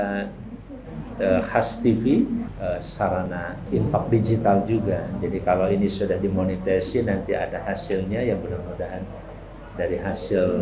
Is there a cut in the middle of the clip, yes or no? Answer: yes